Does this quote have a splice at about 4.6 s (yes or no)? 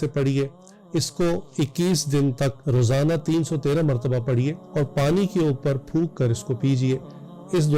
yes